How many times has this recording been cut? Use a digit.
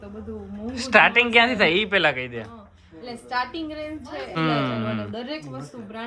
1